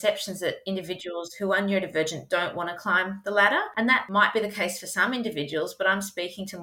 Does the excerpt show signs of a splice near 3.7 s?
yes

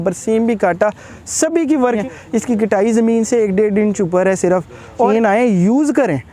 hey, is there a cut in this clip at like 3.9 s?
no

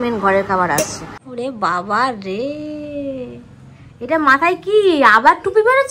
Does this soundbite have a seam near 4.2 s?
no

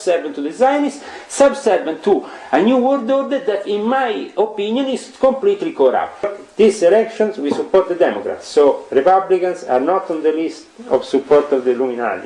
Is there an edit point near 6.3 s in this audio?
yes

